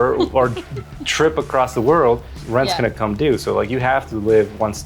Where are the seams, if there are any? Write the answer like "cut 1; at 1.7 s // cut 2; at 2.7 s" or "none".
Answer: cut 1; at 2.3 s

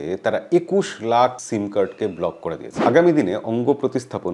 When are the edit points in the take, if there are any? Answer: cut 1; at 2.8 s

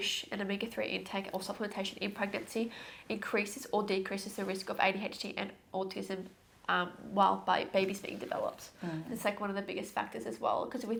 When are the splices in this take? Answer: none

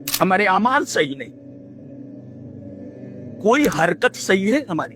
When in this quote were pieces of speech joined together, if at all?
cut 1; at 1.9 s // cut 2; at 3.4 s

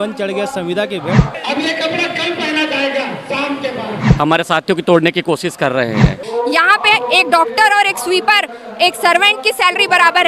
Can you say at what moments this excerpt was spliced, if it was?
cut 1; at 1.3 s // cut 2; at 4.1 s // cut 3; at 6.2 s

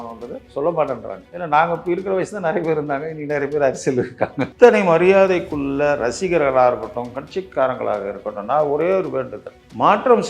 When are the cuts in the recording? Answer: cut 1; at 4.5 s

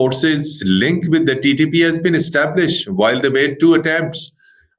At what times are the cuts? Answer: none

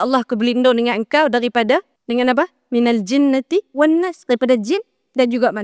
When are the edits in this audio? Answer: cut 1; at 1.9 s

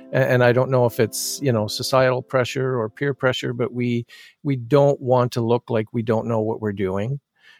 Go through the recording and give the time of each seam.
none

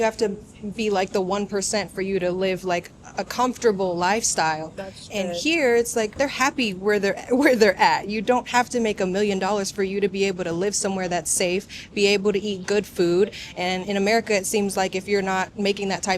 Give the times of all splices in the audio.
cut 1; at 6.1 s

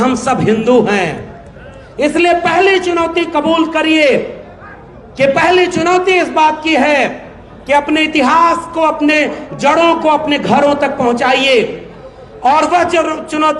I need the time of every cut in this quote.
none

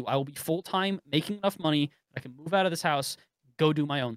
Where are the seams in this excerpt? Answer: none

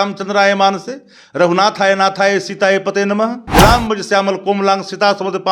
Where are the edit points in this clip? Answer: cut 1; at 3.4 s

